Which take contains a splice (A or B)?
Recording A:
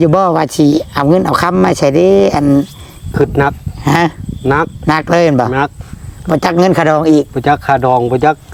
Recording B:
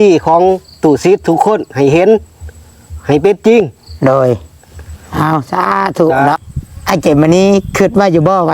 B